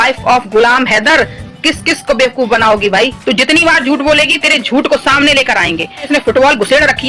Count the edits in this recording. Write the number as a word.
two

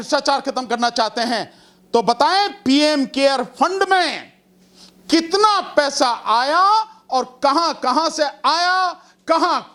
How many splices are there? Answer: zero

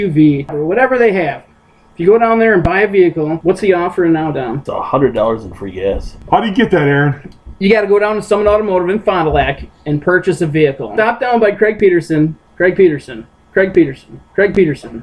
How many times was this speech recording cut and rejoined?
one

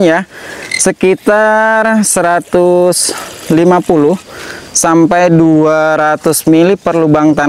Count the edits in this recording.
zero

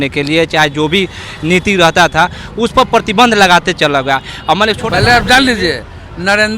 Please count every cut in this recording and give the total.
one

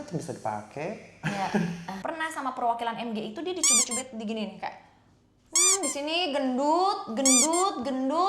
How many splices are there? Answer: one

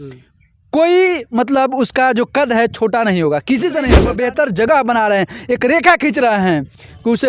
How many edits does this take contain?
one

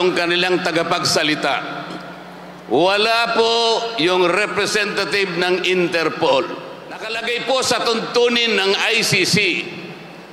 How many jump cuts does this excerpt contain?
one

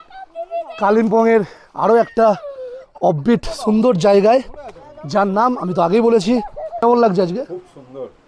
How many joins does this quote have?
one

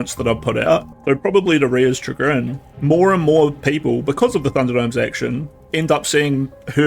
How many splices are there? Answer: two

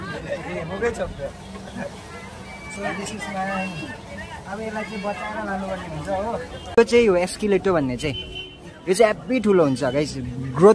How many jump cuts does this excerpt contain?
one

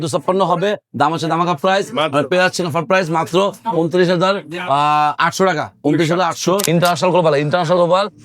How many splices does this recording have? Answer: one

